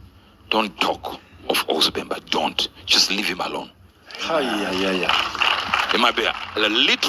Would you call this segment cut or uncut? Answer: uncut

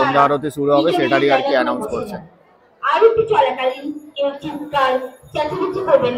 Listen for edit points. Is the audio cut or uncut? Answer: uncut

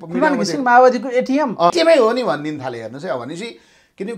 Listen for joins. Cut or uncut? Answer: cut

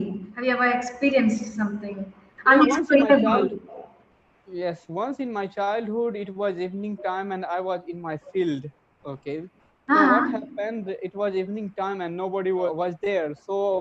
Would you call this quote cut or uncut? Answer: cut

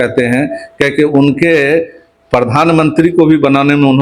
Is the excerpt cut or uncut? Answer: uncut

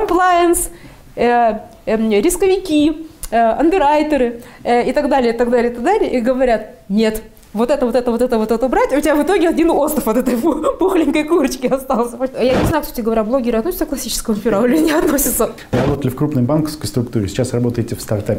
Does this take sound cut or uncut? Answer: cut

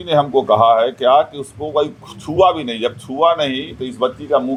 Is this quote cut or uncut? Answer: uncut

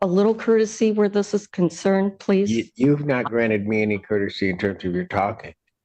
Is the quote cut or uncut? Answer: uncut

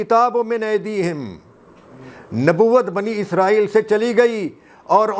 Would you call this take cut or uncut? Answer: uncut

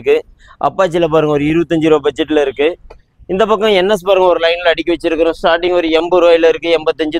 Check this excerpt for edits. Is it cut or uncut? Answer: uncut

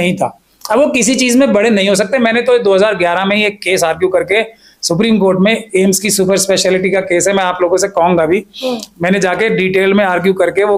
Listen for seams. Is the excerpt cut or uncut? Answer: uncut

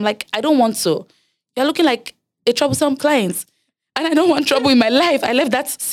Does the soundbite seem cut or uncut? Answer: uncut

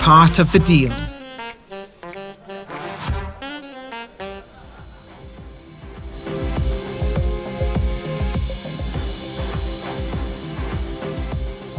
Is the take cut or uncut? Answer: cut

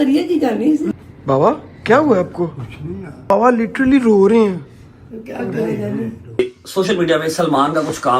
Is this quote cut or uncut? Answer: cut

